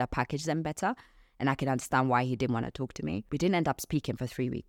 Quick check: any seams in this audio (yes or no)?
yes